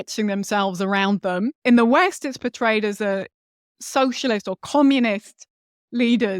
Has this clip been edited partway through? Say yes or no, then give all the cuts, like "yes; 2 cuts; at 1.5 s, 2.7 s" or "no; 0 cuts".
yes; 1 cut; at 1.6 s